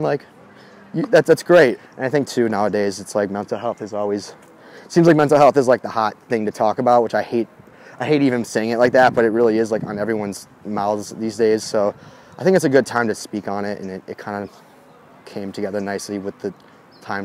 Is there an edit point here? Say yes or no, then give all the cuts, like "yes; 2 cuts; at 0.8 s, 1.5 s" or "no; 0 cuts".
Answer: yes; 1 cut; at 1.8 s